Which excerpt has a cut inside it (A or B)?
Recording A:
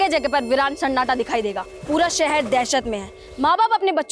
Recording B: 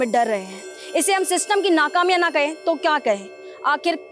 A